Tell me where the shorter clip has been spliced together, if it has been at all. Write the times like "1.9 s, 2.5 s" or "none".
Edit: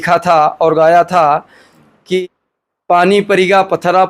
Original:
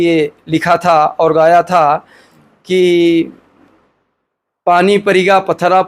2.2 s